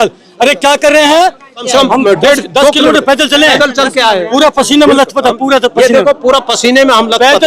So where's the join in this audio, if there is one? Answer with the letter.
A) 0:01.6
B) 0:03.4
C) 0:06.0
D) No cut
A